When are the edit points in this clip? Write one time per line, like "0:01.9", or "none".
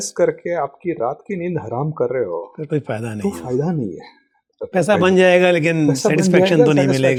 none